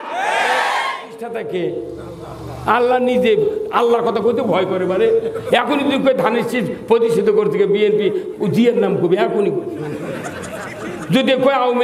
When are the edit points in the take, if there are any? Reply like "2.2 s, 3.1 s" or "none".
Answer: 1.3 s